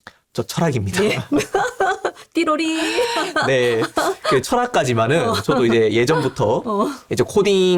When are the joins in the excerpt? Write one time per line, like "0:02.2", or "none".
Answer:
none